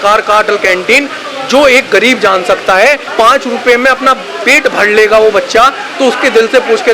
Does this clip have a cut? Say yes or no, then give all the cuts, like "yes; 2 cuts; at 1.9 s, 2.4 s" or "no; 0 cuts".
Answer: yes; 1 cut; at 3.1 s